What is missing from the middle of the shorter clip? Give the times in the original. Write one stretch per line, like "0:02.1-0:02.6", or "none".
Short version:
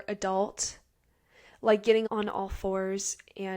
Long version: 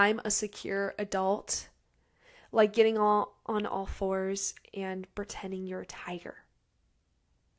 0:03.0-0:03.4